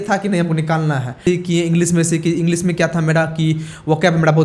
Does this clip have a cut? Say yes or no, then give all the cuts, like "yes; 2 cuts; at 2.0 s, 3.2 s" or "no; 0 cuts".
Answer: yes; 1 cut; at 1.2 s